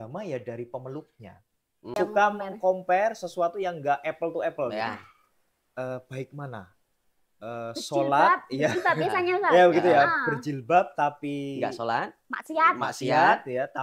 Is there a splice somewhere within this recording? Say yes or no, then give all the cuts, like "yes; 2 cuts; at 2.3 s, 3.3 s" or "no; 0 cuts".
yes; 1 cut; at 1.9 s